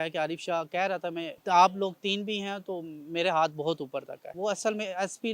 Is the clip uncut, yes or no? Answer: no